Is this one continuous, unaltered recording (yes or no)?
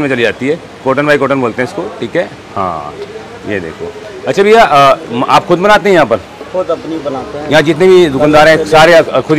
yes